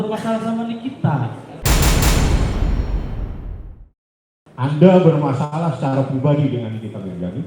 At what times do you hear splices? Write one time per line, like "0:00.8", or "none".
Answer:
0:04.6